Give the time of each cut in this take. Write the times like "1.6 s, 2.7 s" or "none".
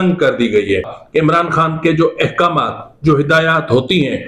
1.0 s